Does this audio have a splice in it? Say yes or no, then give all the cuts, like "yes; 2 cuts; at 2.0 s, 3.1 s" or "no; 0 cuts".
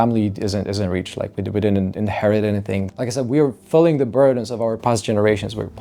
yes; 1 cut; at 2.9 s